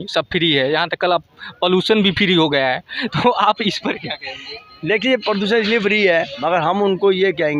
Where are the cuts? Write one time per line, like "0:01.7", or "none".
0:06.4